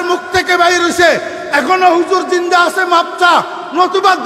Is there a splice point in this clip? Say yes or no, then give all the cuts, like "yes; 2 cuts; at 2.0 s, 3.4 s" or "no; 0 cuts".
no; 0 cuts